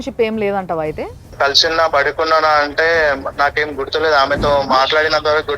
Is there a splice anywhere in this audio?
yes; 1 cut; at 1.3 s

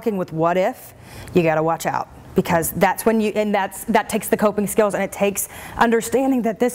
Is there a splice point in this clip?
no; 0 cuts

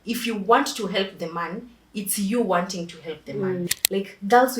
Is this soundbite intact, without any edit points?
no; 1 cut; at 3.7 s

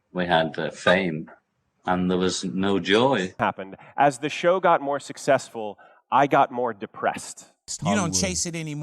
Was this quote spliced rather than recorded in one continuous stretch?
yes; 2 cuts; at 3.4 s, 7.7 s

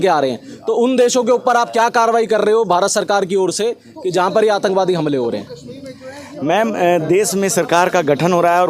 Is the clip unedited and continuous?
yes; 0 cuts

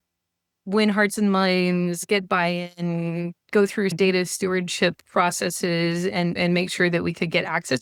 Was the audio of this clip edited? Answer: no; 0 cuts

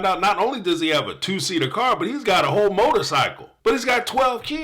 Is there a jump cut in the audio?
yes; 1 cut; at 3.4 s

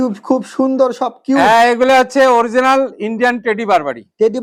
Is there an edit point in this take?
no; 0 cuts

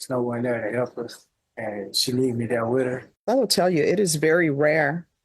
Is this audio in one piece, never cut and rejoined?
no; 1 cut; at 3.1 s

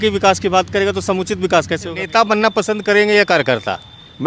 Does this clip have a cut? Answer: yes; 1 cut; at 2.0 s

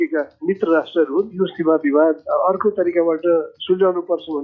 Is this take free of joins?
no; 1 cut; at 1.3 s

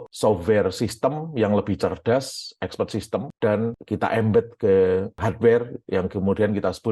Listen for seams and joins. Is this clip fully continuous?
yes; 0 cuts

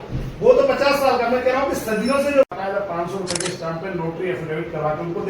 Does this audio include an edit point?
yes; 1 cut; at 2.4 s

